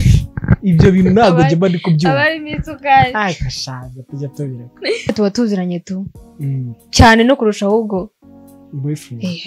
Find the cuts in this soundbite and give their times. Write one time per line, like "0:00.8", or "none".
0:05.1